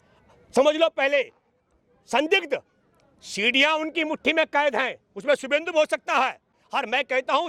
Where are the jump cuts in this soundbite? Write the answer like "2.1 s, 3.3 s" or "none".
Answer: none